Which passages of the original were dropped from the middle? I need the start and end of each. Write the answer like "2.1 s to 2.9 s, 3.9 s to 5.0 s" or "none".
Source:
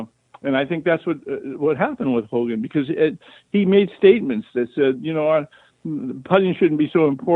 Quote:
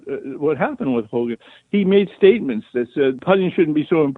2.6 s to 3.2 s, 5.0 s to 6.2 s